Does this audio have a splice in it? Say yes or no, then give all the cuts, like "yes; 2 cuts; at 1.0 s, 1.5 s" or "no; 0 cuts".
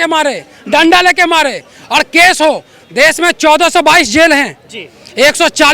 no; 0 cuts